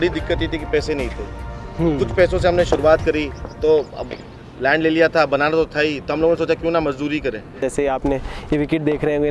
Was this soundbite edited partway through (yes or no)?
yes